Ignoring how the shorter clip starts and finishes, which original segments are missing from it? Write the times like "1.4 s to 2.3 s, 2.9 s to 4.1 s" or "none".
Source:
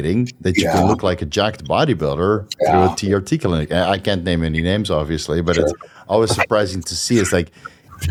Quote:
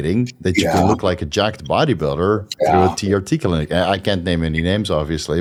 none